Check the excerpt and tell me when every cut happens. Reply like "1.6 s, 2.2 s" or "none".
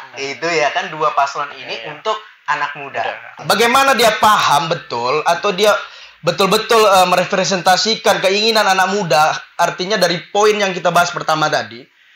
3.3 s